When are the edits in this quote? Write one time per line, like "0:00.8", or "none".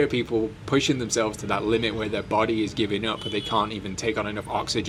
none

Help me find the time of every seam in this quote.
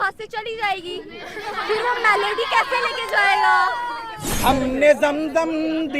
0:04.4

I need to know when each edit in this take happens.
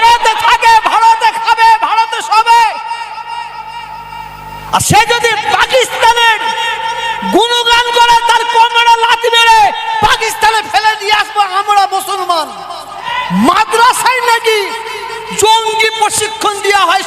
0:13.0

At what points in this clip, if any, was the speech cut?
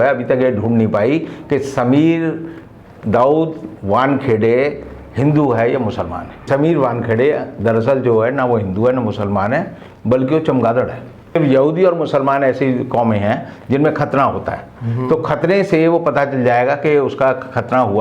0:06.5
0:11.3

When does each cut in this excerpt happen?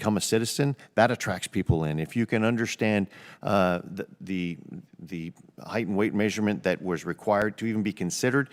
none

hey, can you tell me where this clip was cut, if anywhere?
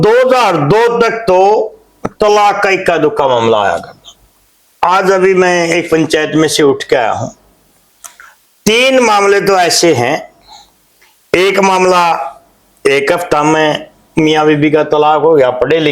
none

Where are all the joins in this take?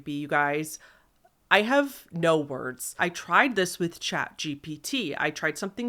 0:03.0

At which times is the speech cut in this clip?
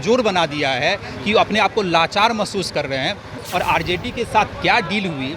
0:03.3

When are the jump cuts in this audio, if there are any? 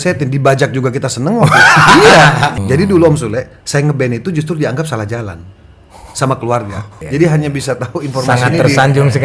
0:02.6
0:06.9

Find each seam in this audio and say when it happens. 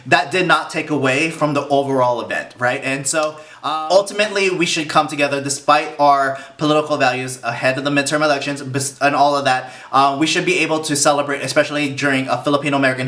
0:03.7

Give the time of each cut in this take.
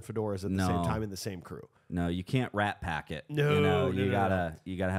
none

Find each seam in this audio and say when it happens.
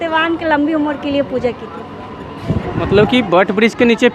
none

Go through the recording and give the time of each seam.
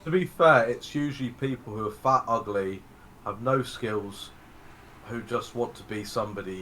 none

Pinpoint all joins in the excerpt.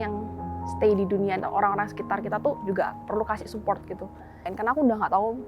0:04.5

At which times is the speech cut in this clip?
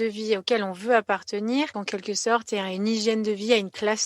0:01.8

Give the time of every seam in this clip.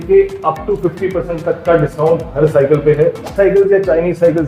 0:03.3

